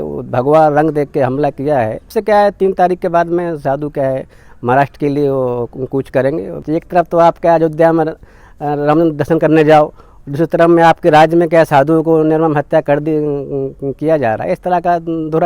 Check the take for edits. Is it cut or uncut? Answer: cut